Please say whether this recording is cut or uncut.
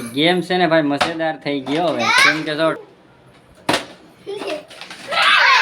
cut